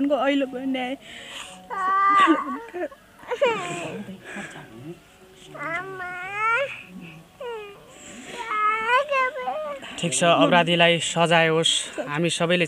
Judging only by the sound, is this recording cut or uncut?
uncut